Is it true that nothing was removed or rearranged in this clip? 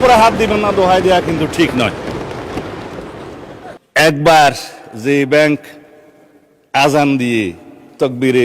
no; 1 cut; at 3.8 s

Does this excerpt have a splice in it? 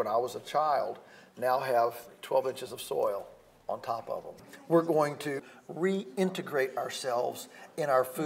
yes; 2 cuts; at 4.3 s, 5.4 s

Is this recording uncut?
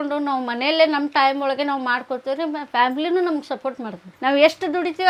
no; 1 cut; at 4.1 s

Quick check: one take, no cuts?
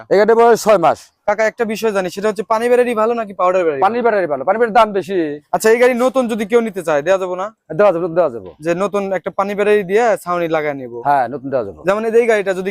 no; 2 cuts; at 1.1 s, 5.4 s

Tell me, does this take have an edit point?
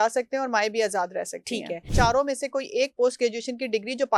yes; 1 cut; at 1.9 s

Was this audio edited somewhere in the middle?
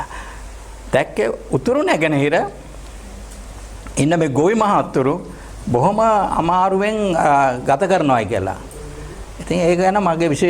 no; 0 cuts

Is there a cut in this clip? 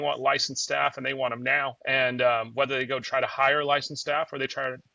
yes; 1 cut; at 1.8 s

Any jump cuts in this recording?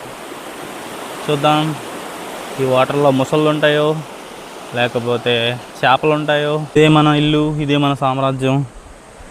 yes; 1 cut; at 6.8 s

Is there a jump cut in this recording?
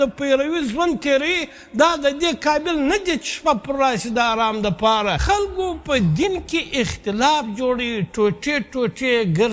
yes; 1 cut; at 5.2 s

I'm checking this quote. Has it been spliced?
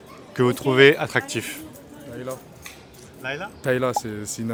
no; 0 cuts

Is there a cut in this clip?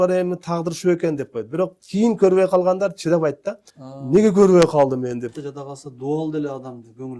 yes; 1 cut; at 5.3 s

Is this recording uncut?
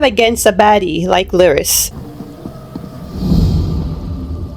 no; 1 cut; at 1.8 s

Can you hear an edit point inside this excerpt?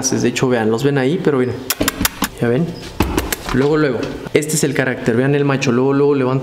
yes; 2 cuts; at 2.3 s, 4.1 s

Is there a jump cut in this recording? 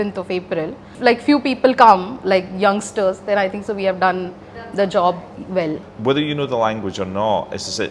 yes; 2 cuts; at 0.9 s, 5.8 s

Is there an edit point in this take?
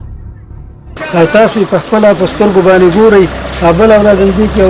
yes; 1 cut; at 0.9 s

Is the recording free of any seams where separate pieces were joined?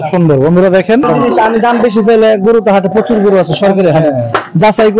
no; 1 cut; at 1.1 s

